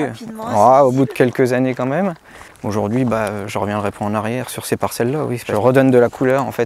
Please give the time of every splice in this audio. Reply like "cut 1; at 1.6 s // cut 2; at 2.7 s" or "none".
none